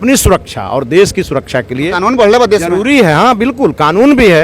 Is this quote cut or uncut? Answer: uncut